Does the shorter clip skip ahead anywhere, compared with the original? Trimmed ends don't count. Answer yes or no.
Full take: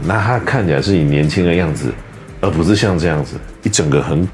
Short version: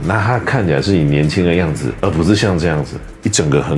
yes